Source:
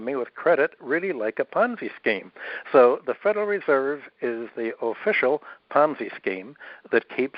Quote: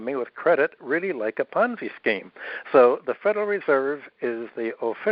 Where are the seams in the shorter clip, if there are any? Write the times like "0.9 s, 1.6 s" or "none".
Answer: none